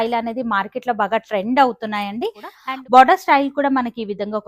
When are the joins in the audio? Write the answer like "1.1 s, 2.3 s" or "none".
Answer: 2.5 s